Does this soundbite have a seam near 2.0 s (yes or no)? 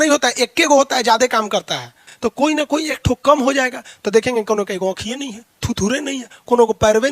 yes